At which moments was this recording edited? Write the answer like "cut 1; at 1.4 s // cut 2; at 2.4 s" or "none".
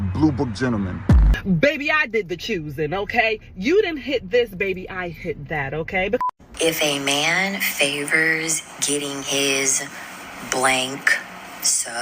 cut 1; at 1.3 s // cut 2; at 6.2 s